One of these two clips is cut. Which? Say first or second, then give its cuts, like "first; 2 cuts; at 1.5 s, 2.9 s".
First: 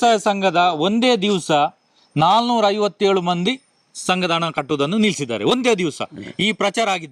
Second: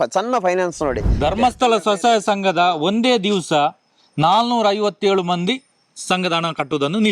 second; 1 cut; at 1.1 s